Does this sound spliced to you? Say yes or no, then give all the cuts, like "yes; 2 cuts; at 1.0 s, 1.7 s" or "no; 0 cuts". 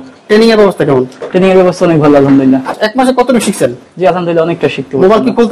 yes; 1 cut; at 2.7 s